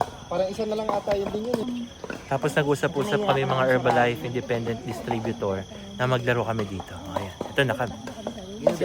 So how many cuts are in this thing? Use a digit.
1